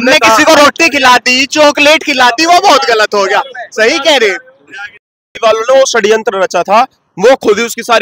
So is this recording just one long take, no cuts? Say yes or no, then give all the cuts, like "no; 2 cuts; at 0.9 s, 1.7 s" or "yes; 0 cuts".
no; 1 cut; at 5.2 s